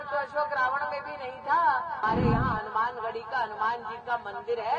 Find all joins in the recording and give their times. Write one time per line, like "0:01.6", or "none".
0:02.0